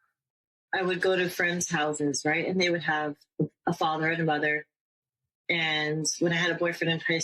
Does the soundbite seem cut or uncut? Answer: uncut